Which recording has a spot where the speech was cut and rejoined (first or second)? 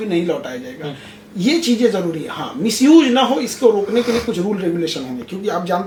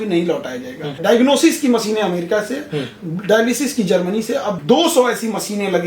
second